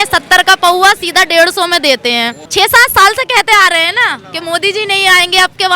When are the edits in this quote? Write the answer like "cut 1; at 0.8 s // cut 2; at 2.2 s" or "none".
cut 1; at 2.4 s

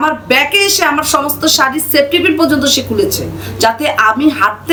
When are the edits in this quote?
none

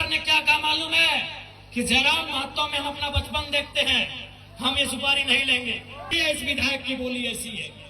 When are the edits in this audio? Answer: cut 1; at 6.1 s

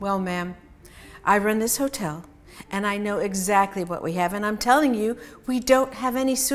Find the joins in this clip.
none

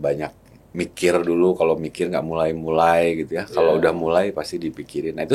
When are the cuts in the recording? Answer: none

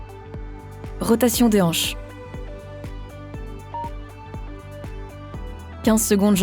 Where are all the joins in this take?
cut 1; at 1.0 s // cut 2; at 1.8 s // cut 3; at 5.7 s

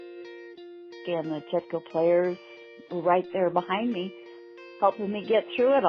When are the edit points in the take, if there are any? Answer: cut 1; at 1.0 s

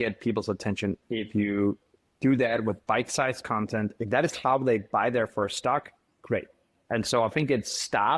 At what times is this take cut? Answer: cut 1; at 1.0 s // cut 2; at 6.7 s

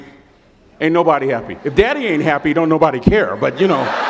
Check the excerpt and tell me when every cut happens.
none

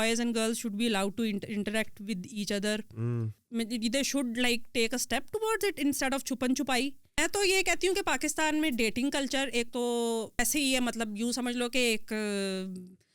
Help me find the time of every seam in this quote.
cut 1; at 3.4 s // cut 2; at 7.1 s // cut 3; at 10.3 s

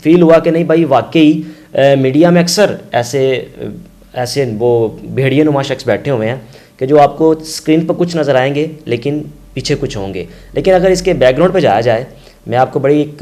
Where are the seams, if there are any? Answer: none

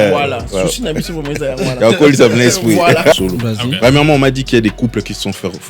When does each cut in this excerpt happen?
cut 1; at 3.1 s

